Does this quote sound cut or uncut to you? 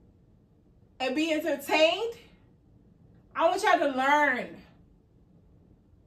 uncut